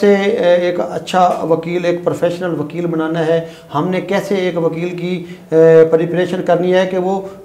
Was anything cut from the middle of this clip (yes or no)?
no